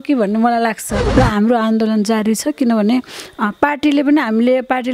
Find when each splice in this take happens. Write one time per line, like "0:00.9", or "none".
0:00.9

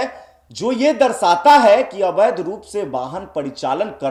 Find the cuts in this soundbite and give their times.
none

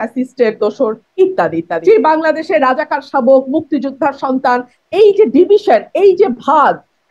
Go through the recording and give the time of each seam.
0:01.7

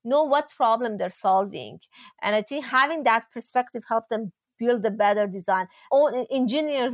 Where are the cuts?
0:05.9

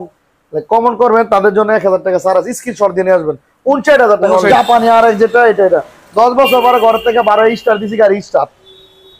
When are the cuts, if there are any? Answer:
0:04.5

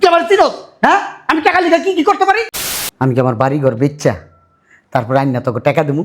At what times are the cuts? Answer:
0:02.6

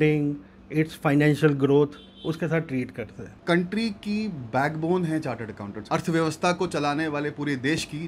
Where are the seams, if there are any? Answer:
0:03.3
0:05.7

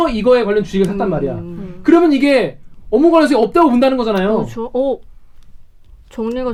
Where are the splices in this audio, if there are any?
none

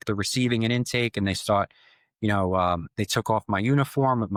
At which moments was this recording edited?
none

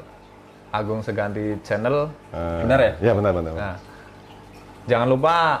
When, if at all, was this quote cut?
none

